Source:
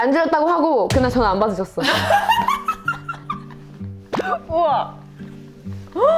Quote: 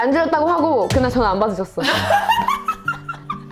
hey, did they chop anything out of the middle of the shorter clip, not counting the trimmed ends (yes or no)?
no